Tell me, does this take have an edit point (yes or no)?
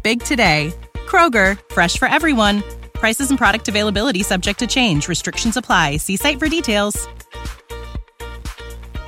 no